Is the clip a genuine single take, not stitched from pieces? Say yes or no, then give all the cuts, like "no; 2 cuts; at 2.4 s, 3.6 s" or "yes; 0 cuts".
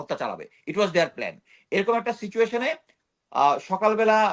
yes; 0 cuts